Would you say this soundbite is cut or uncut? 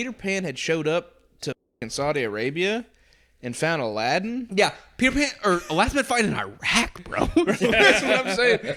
uncut